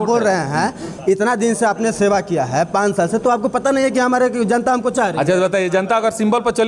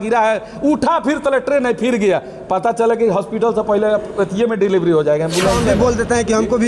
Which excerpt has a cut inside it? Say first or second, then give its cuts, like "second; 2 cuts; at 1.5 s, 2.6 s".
second; 1 cut; at 5.7 s